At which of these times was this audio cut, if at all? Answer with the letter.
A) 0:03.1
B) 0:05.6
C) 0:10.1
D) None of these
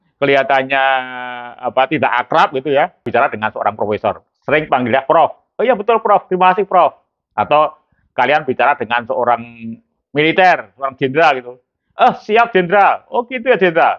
A